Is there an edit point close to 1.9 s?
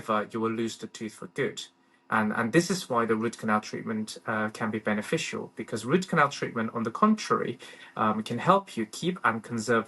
no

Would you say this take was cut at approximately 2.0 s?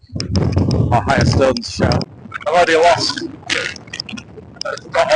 yes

